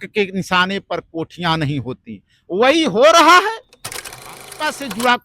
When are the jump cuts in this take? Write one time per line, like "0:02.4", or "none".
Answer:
0:04.2